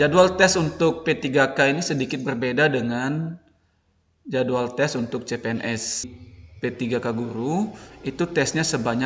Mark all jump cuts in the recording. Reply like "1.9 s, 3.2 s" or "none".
6.1 s